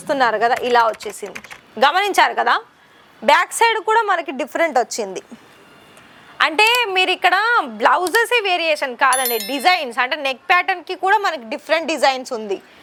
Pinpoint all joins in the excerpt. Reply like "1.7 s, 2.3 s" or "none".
none

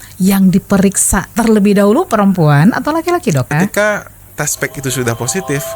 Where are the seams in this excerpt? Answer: 1.3 s, 3.5 s

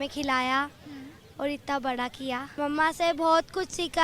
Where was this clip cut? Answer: 2.5 s

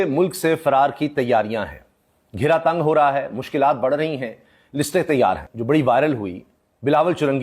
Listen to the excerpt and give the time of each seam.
none

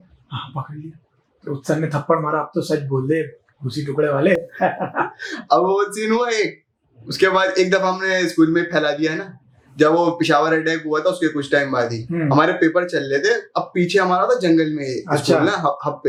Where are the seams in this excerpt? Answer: none

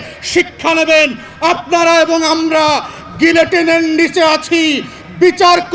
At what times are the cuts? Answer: none

